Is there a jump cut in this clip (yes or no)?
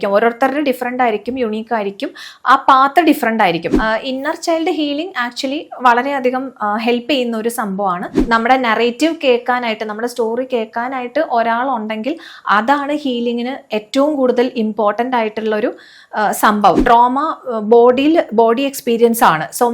yes